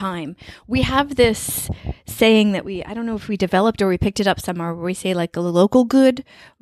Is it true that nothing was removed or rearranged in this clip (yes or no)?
yes